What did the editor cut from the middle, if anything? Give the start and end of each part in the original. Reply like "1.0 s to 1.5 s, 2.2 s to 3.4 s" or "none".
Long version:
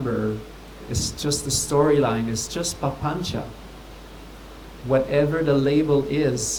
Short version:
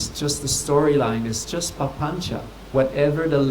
3.6 s to 4.7 s